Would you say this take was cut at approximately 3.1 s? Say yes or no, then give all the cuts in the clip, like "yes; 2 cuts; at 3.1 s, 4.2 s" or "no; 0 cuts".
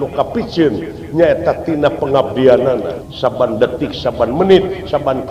yes; 1 cut; at 3.1 s